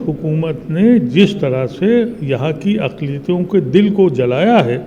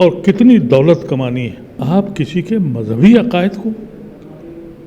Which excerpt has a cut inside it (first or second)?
second